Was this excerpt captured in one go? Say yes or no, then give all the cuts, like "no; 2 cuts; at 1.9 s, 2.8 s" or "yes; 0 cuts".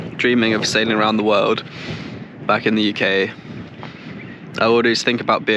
yes; 0 cuts